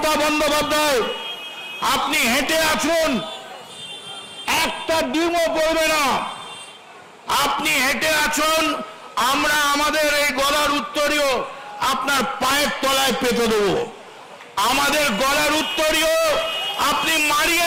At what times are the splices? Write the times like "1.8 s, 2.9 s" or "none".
none